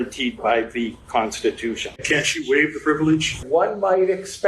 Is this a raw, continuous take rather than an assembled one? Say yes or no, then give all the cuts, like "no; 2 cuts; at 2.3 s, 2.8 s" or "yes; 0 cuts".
no; 2 cuts; at 1.9 s, 3.4 s